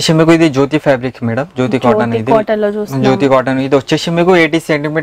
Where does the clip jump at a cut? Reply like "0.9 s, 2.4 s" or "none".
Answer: none